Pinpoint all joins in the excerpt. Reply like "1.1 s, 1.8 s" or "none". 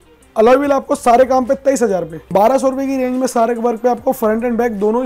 2.2 s